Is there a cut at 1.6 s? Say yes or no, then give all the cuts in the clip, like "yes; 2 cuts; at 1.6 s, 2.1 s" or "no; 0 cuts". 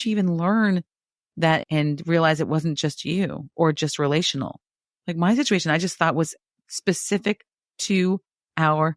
yes; 1 cut; at 1.6 s